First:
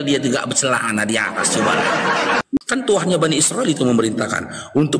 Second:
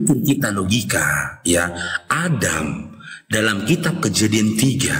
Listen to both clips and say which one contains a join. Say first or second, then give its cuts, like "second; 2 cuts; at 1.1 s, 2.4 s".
first; 1 cut; at 2.6 s